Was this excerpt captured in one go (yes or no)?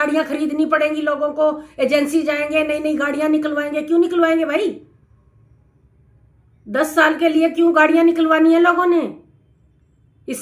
yes